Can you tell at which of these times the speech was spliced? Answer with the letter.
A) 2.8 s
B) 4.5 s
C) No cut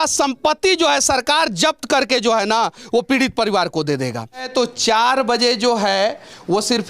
B